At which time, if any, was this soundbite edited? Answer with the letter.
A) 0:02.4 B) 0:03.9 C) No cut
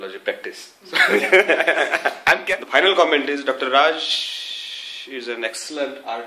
A